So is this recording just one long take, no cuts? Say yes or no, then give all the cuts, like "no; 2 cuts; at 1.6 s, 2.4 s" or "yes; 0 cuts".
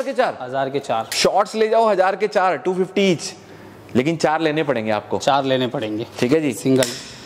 yes; 0 cuts